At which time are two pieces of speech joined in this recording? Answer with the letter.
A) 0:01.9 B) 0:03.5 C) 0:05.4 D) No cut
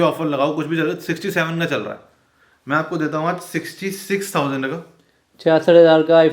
D